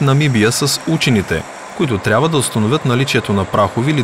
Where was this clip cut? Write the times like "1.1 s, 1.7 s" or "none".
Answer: none